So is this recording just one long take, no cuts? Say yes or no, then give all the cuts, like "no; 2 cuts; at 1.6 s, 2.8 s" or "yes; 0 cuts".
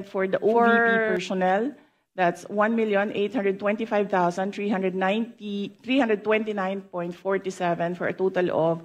yes; 0 cuts